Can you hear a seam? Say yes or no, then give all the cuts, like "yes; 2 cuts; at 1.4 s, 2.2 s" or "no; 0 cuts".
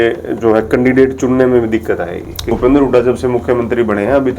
yes; 1 cut; at 2.5 s